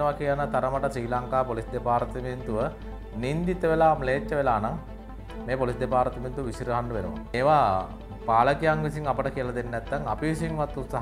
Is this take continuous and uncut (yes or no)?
no